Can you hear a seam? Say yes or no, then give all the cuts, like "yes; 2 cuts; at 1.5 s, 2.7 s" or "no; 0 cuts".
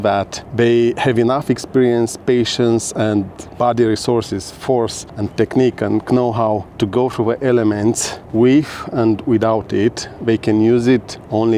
no; 0 cuts